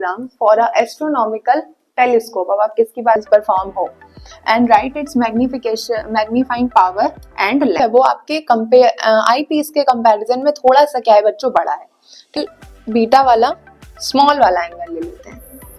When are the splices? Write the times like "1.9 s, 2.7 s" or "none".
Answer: 3.2 s, 7.8 s, 12.4 s